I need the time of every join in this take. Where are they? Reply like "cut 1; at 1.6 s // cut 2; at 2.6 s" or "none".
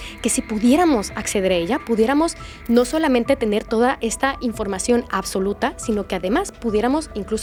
none